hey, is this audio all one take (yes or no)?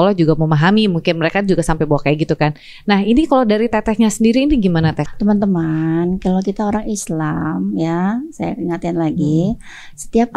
no